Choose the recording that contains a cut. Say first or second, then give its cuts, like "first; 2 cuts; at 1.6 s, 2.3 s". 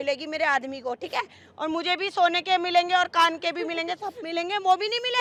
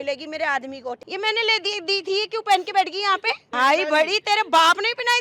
second; 2 cuts; at 1.0 s, 3.4 s